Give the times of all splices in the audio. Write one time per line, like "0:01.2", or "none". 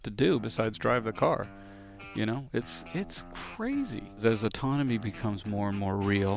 0:04.2